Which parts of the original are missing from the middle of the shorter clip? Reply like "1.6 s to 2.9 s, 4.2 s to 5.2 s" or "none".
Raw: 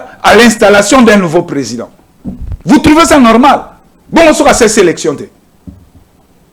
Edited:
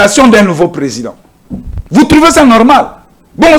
none